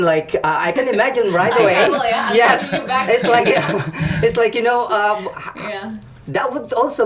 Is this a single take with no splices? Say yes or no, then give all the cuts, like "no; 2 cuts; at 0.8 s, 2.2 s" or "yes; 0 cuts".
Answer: yes; 0 cuts